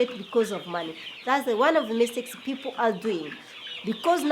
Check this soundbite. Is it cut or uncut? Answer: uncut